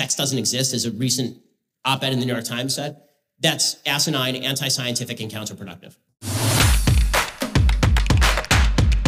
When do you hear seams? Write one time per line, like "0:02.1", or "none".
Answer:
0:06.3